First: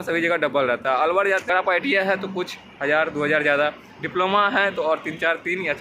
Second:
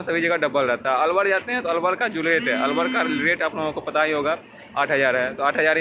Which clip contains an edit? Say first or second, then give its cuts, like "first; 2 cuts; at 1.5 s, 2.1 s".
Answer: first; 1 cut; at 1.4 s